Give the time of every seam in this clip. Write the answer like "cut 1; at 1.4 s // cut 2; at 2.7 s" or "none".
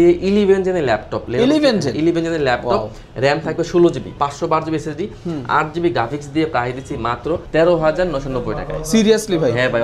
cut 1; at 4.2 s // cut 2; at 7.4 s